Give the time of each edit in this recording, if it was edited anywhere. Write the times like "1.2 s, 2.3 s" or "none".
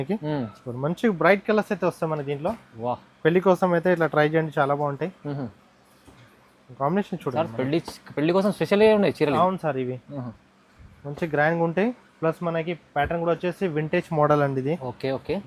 none